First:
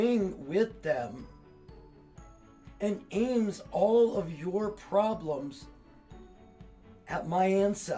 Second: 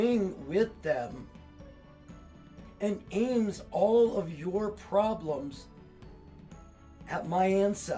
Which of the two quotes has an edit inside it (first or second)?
second